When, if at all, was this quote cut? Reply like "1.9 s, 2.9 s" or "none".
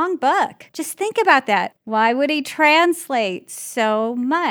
none